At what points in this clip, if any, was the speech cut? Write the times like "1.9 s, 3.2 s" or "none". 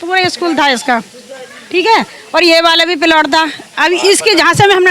none